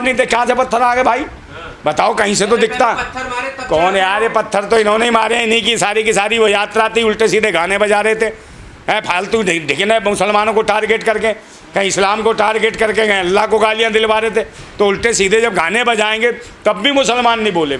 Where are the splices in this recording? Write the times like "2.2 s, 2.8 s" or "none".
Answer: none